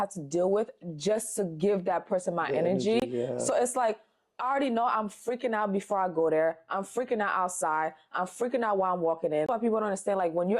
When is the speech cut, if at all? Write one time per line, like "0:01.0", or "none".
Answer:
none